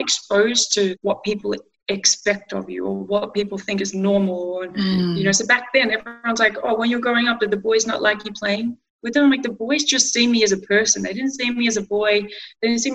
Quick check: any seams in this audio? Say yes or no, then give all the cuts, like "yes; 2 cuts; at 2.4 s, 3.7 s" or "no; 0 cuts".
yes; 1 cut; at 1.0 s